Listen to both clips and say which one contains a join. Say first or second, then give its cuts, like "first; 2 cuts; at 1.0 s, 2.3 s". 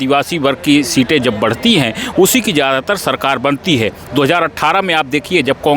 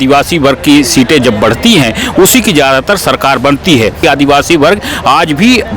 second; 1 cut; at 4.0 s